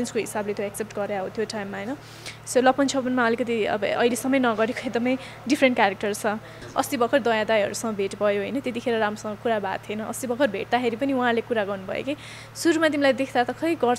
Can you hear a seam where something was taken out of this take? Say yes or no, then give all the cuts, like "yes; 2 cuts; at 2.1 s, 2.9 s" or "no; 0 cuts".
yes; 1 cut; at 6.5 s